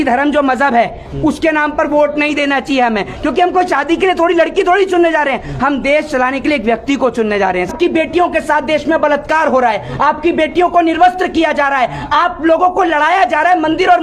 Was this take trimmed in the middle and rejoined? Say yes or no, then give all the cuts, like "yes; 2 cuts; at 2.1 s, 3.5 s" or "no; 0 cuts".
yes; 1 cut; at 7.7 s